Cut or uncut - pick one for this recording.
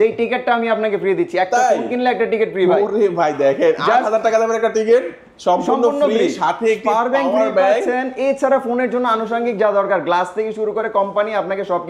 uncut